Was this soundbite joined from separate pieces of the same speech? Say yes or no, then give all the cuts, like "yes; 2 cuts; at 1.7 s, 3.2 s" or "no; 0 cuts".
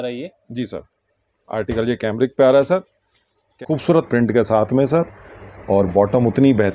yes; 1 cut; at 3.6 s